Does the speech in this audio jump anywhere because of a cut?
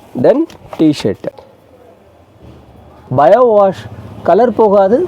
yes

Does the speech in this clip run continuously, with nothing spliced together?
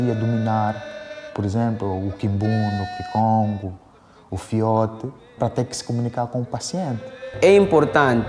no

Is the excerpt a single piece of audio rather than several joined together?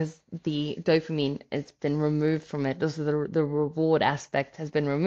yes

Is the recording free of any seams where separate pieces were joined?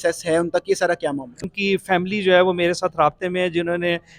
no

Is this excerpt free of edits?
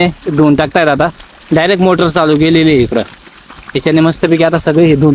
yes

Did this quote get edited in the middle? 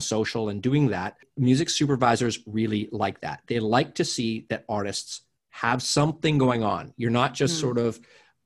yes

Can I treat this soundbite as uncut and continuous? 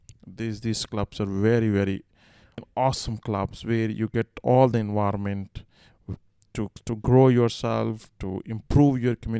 no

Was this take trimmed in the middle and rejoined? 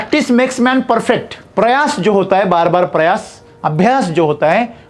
yes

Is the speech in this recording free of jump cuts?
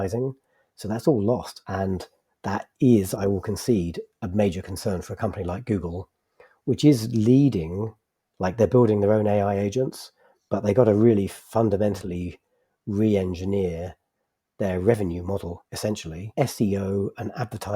no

